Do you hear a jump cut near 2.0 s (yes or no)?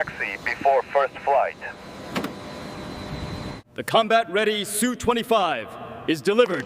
no